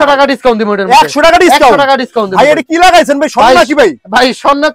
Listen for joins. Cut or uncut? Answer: uncut